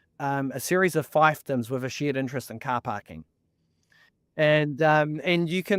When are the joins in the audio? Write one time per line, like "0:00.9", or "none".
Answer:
none